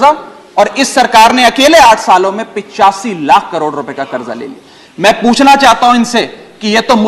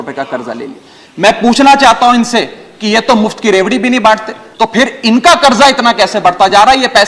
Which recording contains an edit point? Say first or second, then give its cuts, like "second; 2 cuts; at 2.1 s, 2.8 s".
second; 1 cut; at 4.4 s